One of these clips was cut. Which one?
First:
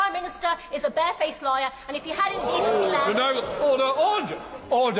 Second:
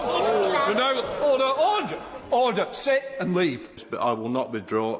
second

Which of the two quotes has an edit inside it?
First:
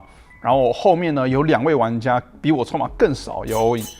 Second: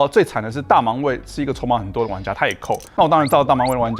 second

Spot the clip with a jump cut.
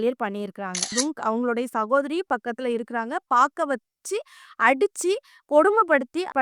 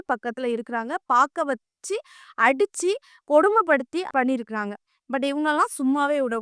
first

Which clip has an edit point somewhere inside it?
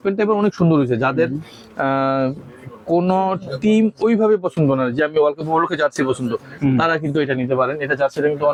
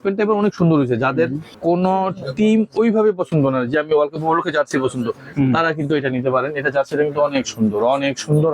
second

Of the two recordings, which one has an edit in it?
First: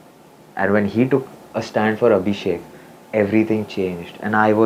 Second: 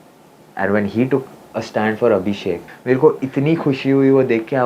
second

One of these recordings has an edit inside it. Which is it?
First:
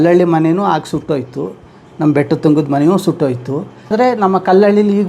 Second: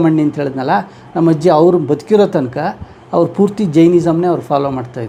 first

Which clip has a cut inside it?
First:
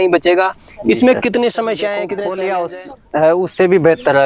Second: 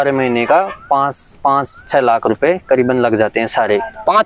first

